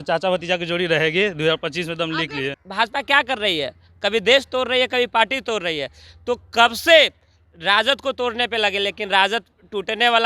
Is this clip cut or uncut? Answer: cut